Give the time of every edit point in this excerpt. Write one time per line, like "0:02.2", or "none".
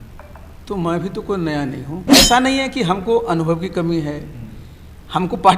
0:02.0